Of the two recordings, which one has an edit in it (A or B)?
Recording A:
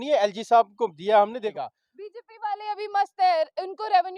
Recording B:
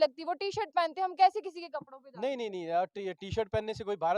A